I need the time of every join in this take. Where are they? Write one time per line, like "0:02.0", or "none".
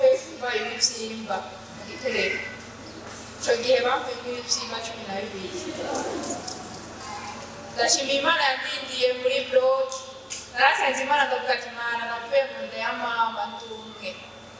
none